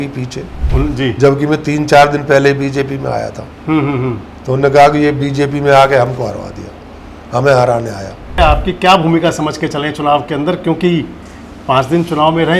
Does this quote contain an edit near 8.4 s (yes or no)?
yes